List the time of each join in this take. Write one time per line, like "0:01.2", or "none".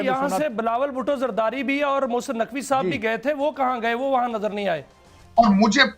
0:05.0